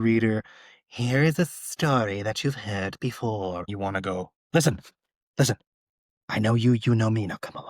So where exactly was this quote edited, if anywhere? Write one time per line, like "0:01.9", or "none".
0:03.7